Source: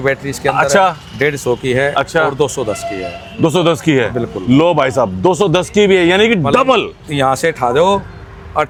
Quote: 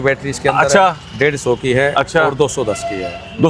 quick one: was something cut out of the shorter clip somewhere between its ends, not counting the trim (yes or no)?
no